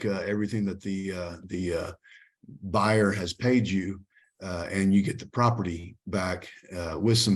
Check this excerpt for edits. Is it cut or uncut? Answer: uncut